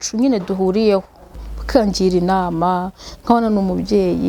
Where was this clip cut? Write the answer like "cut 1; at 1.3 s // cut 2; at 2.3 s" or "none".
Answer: cut 1; at 1.4 s